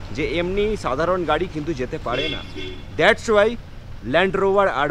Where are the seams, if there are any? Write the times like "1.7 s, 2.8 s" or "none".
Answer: none